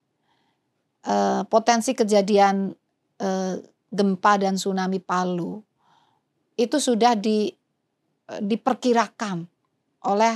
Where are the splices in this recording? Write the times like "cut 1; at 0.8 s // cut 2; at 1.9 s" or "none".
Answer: none